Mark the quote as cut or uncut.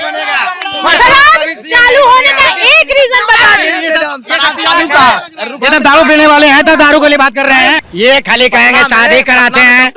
cut